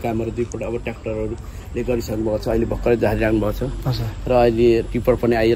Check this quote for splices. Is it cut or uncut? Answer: uncut